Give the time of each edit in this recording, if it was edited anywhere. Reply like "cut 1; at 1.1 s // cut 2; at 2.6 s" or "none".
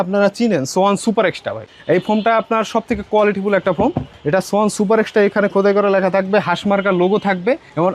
none

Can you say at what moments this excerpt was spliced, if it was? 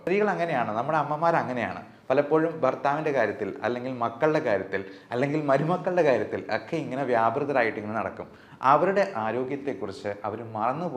none

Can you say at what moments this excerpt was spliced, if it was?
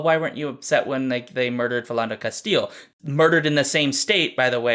cut 1; at 2.9 s

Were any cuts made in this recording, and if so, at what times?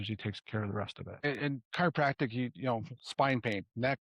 cut 1; at 1.2 s

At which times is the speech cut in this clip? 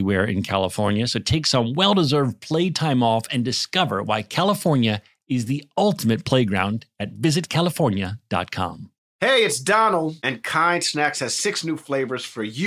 none

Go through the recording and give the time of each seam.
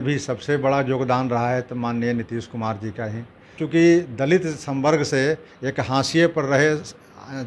cut 1; at 3.6 s

